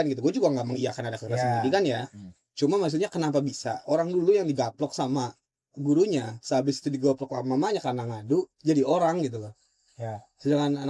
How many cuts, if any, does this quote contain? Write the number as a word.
zero